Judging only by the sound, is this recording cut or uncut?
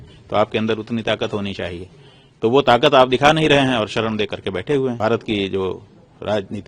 cut